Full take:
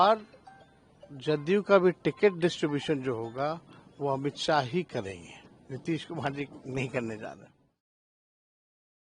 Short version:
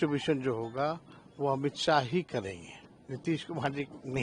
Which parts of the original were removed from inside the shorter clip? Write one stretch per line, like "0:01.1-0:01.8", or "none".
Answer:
none